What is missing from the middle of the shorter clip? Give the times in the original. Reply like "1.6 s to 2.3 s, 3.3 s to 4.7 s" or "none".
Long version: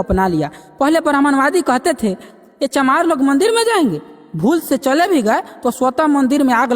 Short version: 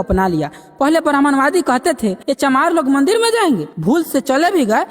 2.2 s to 2.6 s, 4.0 s to 4.3 s